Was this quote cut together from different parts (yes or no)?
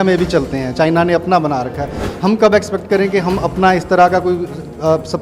no